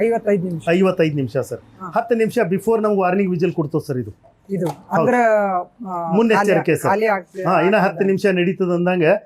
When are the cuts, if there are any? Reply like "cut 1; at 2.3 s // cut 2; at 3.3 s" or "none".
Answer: none

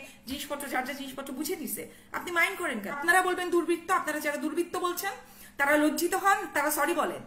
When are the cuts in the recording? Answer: cut 1; at 3.0 s

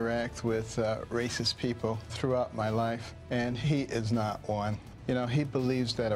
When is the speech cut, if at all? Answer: cut 1; at 2.1 s // cut 2; at 3.1 s // cut 3; at 4.9 s

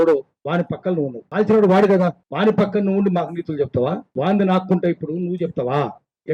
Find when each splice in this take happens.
cut 1; at 1.2 s // cut 2; at 2.2 s // cut 3; at 4.1 s

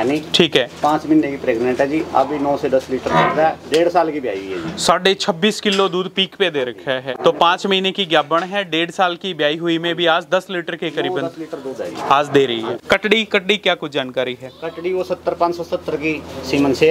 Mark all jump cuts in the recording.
cut 1; at 7.1 s // cut 2; at 12.8 s

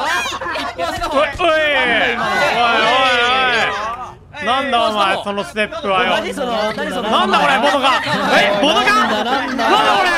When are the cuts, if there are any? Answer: none

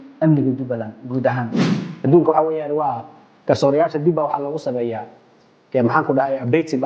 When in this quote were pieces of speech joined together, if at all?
cut 1; at 1.9 s

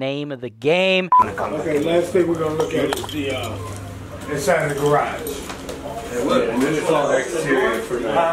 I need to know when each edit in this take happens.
cut 1; at 1.1 s

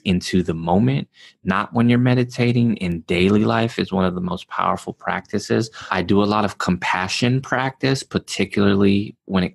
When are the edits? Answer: cut 1; at 5.9 s

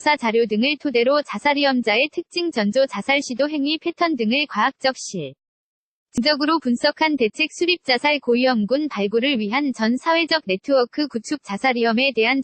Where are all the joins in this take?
cut 1; at 6.2 s

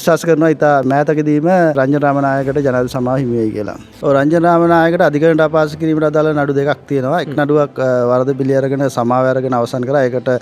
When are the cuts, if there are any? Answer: cut 1; at 0.8 s // cut 2; at 1.8 s

